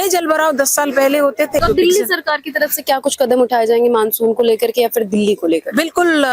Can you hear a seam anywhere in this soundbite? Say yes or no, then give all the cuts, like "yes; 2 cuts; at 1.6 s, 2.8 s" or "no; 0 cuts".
yes; 1 cut; at 1.6 s